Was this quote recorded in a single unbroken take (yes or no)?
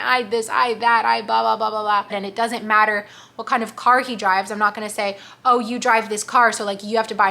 no